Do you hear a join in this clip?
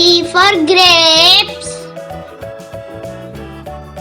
yes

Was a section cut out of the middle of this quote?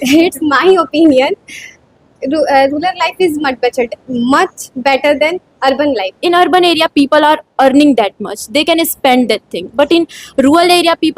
yes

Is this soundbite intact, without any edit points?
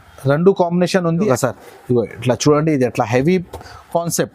no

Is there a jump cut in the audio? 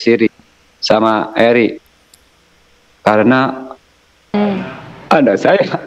no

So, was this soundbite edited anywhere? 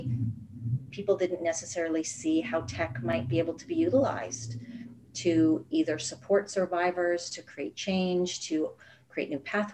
no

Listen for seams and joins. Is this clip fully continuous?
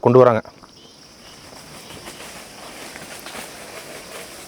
yes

